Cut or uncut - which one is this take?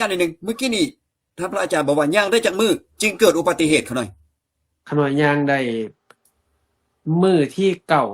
uncut